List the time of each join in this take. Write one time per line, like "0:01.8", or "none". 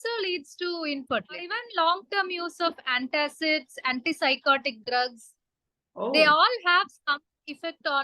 0:01.6